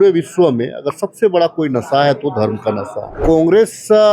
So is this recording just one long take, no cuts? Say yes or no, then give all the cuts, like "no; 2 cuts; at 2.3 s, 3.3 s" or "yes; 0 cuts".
no; 1 cut; at 3.1 s